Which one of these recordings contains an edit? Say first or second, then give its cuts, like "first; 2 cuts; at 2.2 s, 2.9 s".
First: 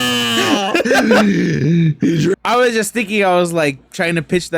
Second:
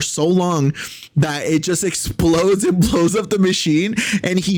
first; 1 cut; at 2.4 s